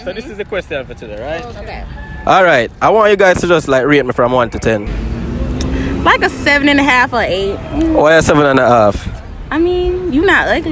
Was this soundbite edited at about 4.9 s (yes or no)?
yes